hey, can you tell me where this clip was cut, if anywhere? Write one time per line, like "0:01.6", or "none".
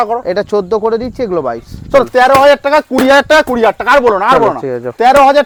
none